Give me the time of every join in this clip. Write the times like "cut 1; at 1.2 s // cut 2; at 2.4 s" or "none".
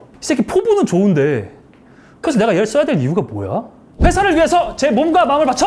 cut 1; at 3.9 s

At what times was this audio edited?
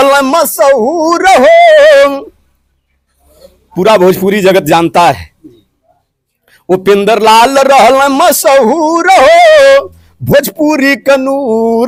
none

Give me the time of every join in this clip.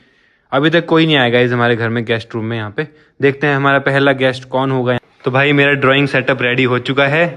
cut 1; at 5.0 s

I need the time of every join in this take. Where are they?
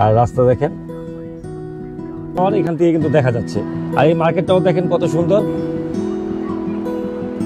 cut 1; at 2.4 s

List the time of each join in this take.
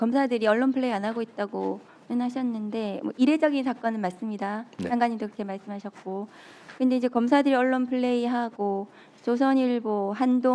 none

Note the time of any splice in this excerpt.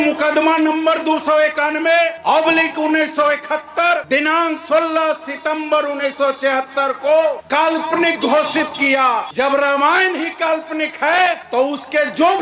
cut 1; at 2.2 s // cut 2; at 4.0 s // cut 3; at 7.4 s // cut 4; at 9.3 s // cut 5; at 11.4 s

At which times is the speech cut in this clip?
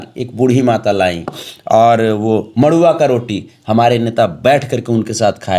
none

